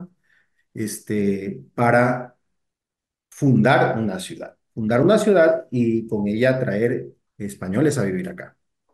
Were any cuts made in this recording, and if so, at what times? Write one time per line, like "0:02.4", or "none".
none

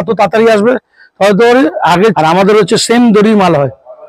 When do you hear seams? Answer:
0:02.2

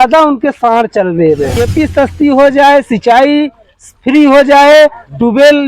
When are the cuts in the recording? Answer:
0:01.6

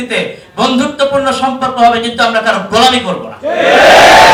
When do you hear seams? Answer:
none

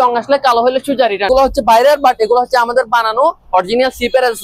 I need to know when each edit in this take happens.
0:01.3

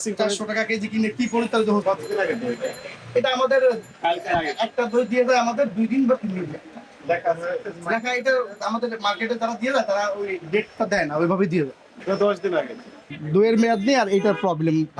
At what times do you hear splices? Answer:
0:01.8
0:07.0
0:11.9
0:13.2

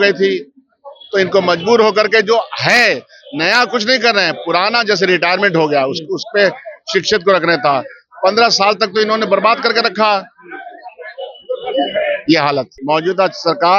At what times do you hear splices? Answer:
0:12.7

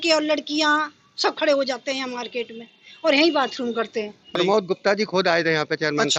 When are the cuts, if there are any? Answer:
0:04.4

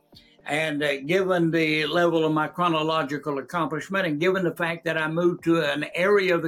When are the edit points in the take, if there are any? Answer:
none

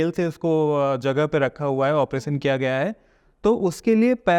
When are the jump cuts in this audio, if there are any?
none

